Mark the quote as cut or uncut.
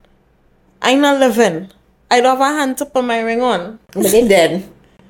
cut